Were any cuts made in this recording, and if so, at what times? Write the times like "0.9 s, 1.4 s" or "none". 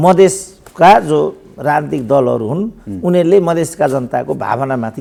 none